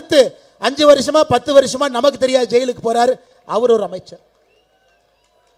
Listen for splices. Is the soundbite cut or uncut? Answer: uncut